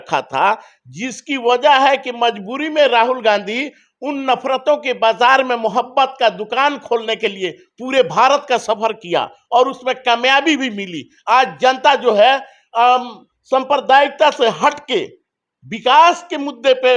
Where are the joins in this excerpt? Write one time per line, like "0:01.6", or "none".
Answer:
none